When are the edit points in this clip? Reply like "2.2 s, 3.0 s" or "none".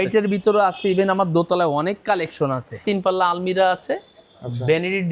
2.8 s